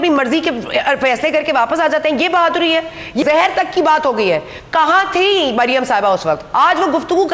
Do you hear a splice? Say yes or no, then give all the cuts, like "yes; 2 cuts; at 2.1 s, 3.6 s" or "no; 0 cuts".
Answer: yes; 2 cuts; at 3.2 s, 6.5 s